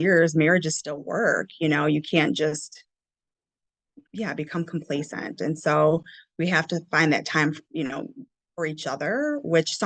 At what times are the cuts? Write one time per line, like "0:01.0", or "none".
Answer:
none